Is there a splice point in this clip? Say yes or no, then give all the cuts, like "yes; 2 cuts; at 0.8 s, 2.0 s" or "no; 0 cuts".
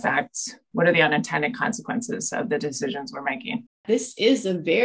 yes; 1 cut; at 3.8 s